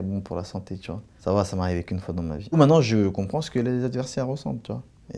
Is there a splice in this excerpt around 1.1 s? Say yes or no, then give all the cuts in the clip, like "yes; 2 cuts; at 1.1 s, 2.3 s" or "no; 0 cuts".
no; 1 cut; at 2.5 s